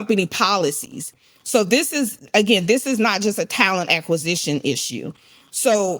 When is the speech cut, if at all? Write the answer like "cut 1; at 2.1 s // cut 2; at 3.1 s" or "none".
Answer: none